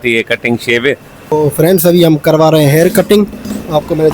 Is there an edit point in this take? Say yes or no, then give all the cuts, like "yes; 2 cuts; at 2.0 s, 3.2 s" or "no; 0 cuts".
yes; 1 cut; at 1.3 s